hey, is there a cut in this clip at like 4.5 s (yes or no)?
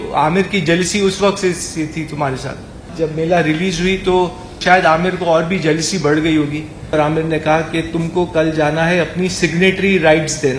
yes